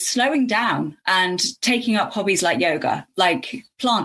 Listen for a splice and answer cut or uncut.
uncut